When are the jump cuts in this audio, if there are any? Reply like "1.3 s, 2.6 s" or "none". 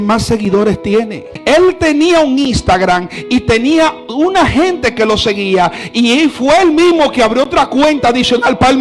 1.3 s